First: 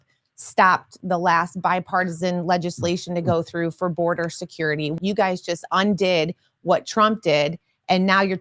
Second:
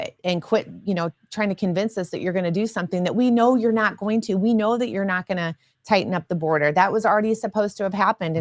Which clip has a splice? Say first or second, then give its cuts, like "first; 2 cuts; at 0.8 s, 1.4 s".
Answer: first; 1 cut; at 4.9 s